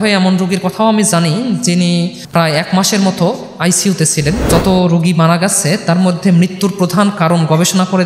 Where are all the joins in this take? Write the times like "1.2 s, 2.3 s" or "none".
2.2 s, 4.5 s